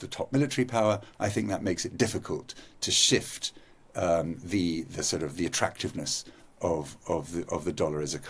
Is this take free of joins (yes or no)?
yes